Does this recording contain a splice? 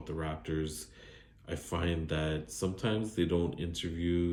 no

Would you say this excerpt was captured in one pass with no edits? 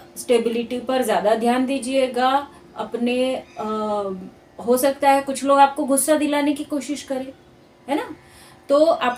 yes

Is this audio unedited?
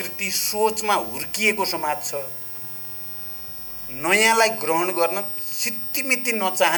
yes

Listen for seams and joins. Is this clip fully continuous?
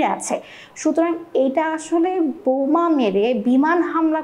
yes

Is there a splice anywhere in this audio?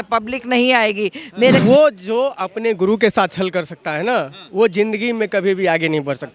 yes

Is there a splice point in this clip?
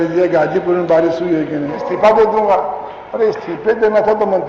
yes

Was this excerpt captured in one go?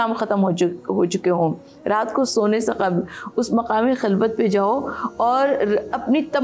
yes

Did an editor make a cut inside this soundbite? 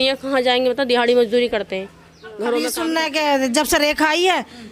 yes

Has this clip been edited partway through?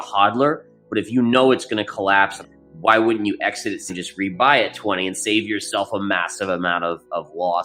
yes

